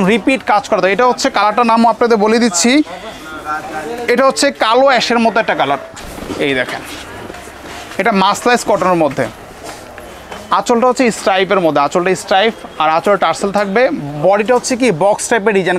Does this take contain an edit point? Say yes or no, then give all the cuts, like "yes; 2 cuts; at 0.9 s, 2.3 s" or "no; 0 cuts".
yes; 1 cut; at 6.0 s